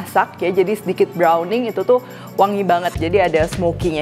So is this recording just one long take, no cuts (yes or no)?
yes